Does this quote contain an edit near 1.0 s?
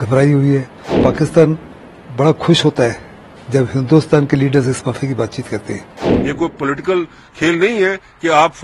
yes; 2 cuts; at 1.0 s, 6.1 s

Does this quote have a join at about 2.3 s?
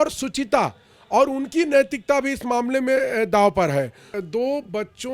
no; 1 cut; at 4.2 s

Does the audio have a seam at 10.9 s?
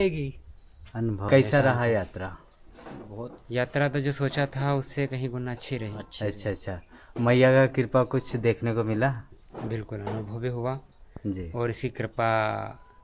no; 1 cut; at 1.2 s

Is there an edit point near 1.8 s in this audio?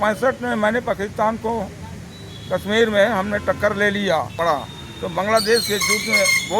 no; 1 cut; at 4.3 s

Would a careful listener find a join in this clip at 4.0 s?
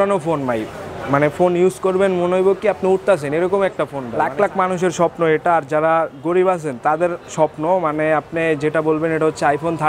yes; 1 cut; at 4.0 s

